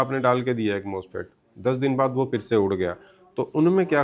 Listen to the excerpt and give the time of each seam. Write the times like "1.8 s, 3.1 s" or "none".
none